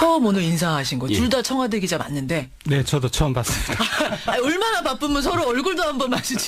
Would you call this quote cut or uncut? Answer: cut